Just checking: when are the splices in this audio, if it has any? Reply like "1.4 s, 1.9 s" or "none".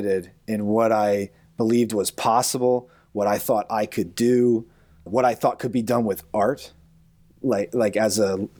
none